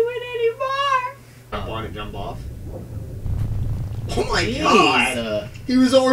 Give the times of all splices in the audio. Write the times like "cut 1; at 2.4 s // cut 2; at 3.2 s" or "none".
cut 1; at 1.5 s